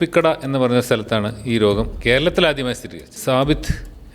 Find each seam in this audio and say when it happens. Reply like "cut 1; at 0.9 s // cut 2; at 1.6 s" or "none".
cut 1; at 1.9 s // cut 2; at 3.1 s